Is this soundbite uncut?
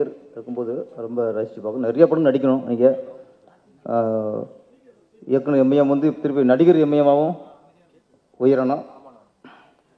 yes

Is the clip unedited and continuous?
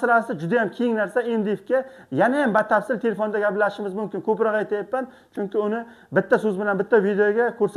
yes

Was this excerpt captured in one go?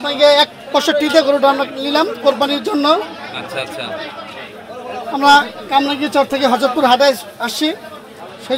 yes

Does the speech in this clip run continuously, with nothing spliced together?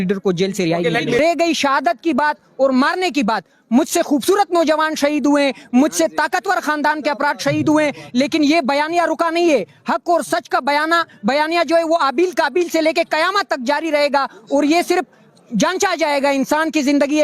no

